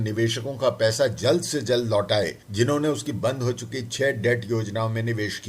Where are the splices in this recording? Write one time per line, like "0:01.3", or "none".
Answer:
0:02.4